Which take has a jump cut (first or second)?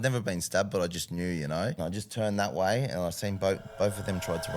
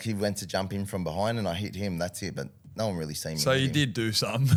first